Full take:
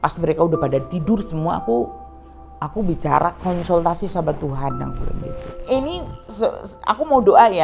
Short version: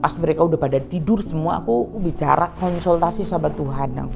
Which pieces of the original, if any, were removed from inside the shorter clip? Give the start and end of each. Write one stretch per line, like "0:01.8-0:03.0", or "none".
0:01.9-0:02.8

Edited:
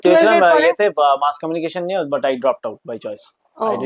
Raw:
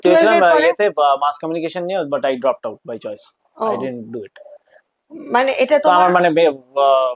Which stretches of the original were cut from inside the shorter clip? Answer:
none

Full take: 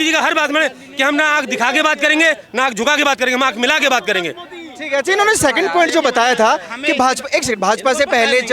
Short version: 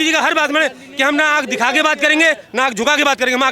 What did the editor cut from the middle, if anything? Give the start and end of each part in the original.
none

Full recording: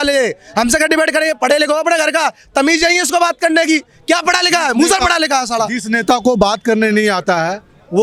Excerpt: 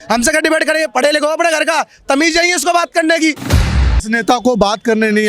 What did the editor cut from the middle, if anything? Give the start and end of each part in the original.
0:04.1-0:05.4

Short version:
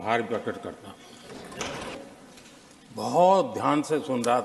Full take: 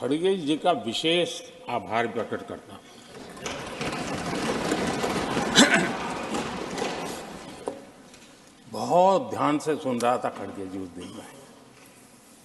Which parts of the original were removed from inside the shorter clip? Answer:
0:03.8-0:07.7

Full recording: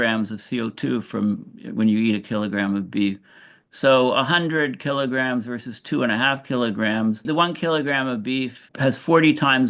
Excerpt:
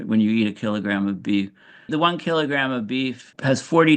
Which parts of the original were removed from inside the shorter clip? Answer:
0:03.5-0:07.2

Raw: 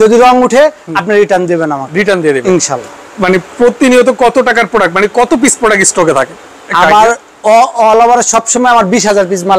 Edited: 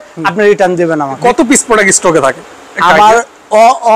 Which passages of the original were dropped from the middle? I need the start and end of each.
0:01.9-0:05.1

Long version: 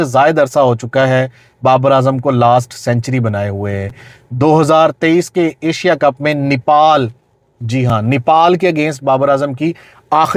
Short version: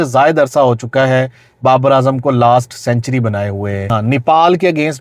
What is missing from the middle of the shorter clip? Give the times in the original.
0:03.9-0:07.9

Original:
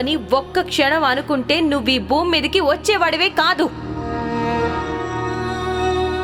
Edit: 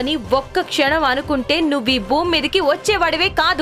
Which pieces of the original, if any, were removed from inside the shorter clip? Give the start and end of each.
none

